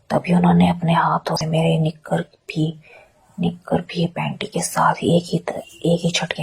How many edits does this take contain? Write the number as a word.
one